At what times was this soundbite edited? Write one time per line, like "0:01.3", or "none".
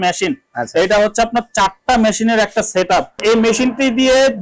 0:03.2